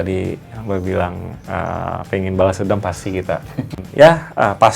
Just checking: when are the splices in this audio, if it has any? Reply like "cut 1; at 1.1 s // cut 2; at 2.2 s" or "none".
cut 1; at 3.8 s